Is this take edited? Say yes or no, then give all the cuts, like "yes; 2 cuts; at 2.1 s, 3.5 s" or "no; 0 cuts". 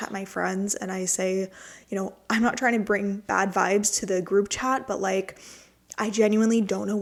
no; 0 cuts